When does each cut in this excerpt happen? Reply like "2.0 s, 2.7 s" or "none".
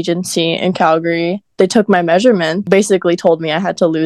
1.4 s, 2.7 s